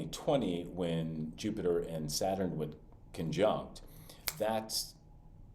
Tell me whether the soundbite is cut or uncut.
uncut